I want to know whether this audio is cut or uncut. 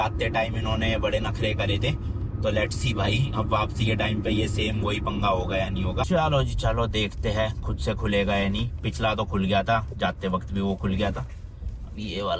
uncut